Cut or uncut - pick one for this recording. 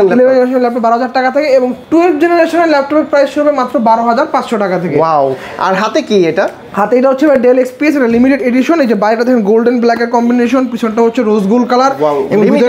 uncut